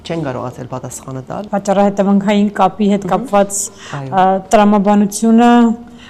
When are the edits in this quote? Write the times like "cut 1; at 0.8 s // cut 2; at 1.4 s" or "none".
cut 1; at 1.3 s